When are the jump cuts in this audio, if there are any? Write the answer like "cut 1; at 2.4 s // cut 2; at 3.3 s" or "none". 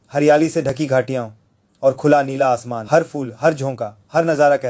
cut 1; at 2.7 s